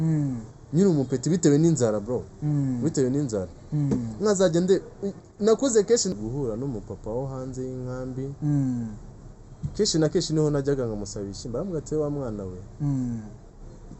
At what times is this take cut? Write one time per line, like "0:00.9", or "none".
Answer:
0:06.1